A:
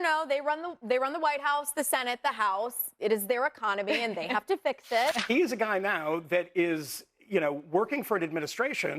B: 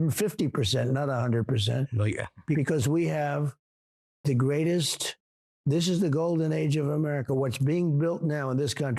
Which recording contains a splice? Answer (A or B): A